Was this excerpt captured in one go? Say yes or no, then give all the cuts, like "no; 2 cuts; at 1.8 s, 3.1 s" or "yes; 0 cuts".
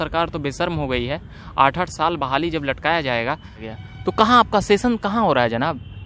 no; 1 cut; at 3.6 s